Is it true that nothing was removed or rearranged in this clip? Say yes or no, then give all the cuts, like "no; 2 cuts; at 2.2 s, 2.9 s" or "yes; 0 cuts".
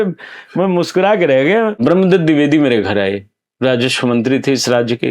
no; 1 cut; at 1.8 s